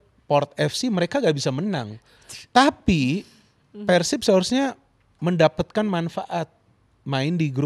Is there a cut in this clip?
no; 0 cuts

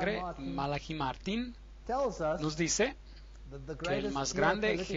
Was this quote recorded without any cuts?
yes; 0 cuts

